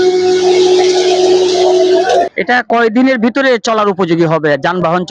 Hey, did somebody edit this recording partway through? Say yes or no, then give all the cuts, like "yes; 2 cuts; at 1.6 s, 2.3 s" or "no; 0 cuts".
yes; 1 cut; at 2.4 s